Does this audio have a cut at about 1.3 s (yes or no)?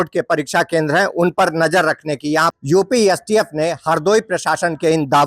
no